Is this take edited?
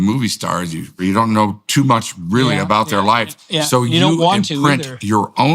yes; 1 cut; at 0.9 s

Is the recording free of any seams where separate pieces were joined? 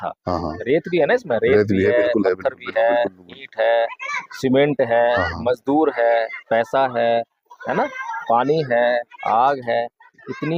yes; 0 cuts

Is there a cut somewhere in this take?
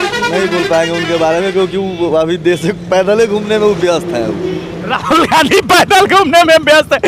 no; 0 cuts

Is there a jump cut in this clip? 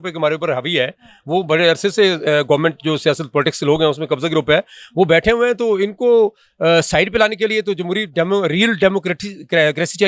no; 0 cuts

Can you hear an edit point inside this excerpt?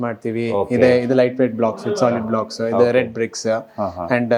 no; 0 cuts

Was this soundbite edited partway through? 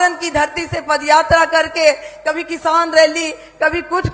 no; 0 cuts

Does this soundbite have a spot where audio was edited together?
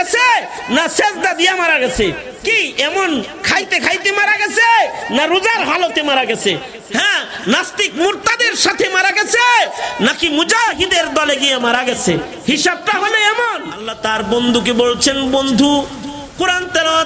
yes; 1 cut; at 13.9 s

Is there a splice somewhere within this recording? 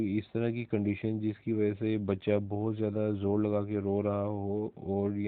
no; 0 cuts

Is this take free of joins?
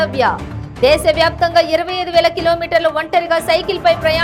yes; 0 cuts

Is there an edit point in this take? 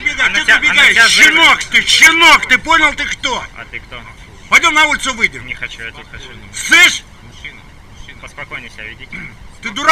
no; 0 cuts

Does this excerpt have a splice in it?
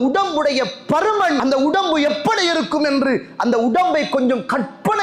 yes; 1 cut; at 1.4 s

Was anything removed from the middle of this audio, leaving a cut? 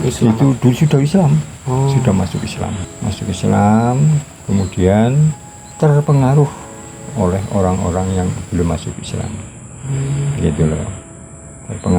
no; 0 cuts

